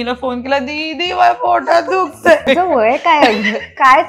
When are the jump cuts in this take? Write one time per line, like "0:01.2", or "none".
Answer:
0:02.4